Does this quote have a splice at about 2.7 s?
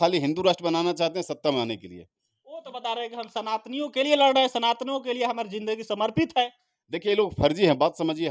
yes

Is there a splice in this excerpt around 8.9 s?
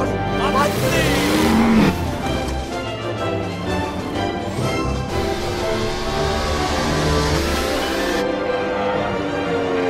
no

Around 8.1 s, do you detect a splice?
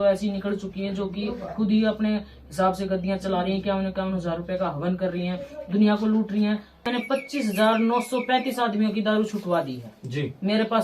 no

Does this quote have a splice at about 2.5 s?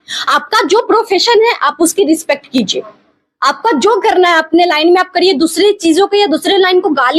no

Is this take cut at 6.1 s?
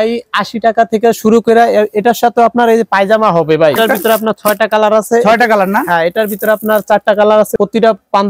no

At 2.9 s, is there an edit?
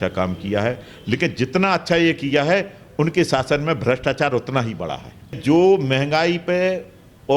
no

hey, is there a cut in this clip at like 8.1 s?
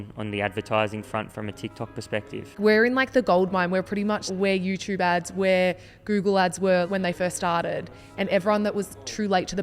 no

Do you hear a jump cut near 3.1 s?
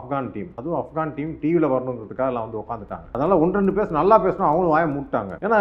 yes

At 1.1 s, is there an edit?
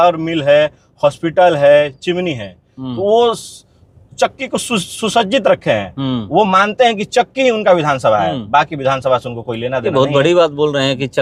no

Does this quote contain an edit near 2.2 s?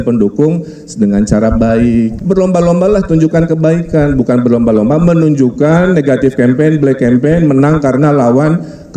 yes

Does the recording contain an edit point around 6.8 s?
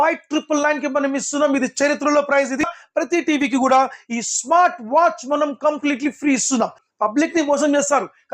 yes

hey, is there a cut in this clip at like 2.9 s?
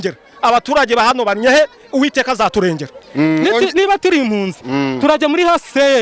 yes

